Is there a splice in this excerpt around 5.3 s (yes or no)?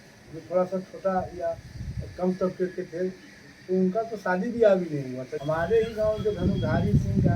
yes